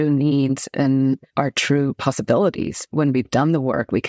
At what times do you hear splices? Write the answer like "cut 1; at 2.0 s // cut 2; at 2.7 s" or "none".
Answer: cut 1; at 1.3 s // cut 2; at 2.9 s

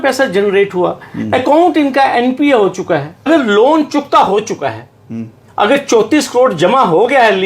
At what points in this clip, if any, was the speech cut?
cut 1; at 3.3 s

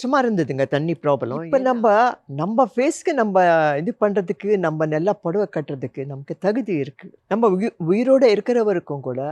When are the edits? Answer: cut 1; at 1.4 s

